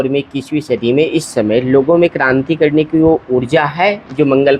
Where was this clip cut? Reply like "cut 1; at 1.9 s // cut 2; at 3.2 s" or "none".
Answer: none

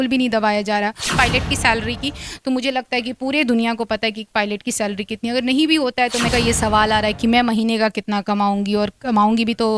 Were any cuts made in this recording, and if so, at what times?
cut 1; at 1.1 s // cut 2; at 6.3 s

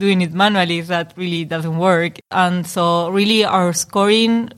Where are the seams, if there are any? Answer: cut 1; at 2.2 s

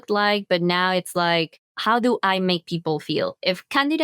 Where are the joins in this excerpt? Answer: cut 1; at 1.7 s

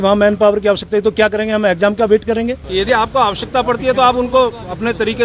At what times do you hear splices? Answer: cut 1; at 2.7 s

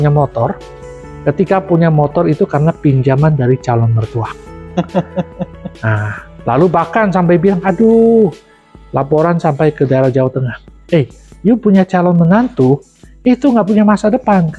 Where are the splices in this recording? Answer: none

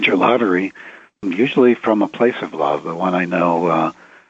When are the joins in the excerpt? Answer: cut 1; at 1.2 s

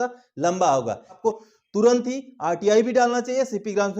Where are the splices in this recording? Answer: cut 1; at 1.2 s

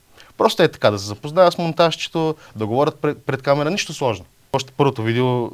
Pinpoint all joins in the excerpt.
cut 1; at 4.5 s

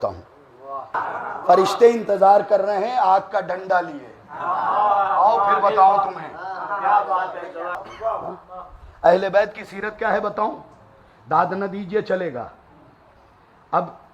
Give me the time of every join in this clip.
cut 1; at 1.0 s // cut 2; at 7.9 s

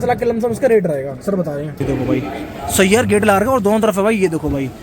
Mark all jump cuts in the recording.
cut 1; at 1.8 s

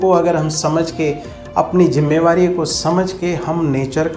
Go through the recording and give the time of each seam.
none

